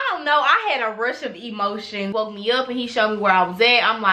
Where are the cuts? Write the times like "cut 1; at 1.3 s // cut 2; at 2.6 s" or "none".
cut 1; at 2.1 s